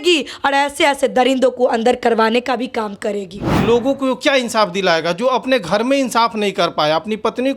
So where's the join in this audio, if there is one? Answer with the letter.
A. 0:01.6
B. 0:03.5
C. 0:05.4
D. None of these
B